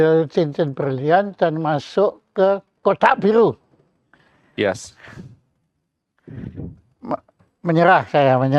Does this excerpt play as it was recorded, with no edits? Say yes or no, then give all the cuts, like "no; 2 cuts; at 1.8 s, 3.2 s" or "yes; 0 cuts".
yes; 0 cuts